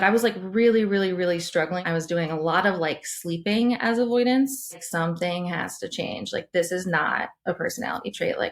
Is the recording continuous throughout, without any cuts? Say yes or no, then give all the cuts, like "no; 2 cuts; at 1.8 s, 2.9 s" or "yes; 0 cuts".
no; 2 cuts; at 1.8 s, 4.8 s